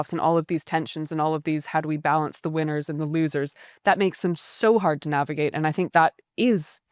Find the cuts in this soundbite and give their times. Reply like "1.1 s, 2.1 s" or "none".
none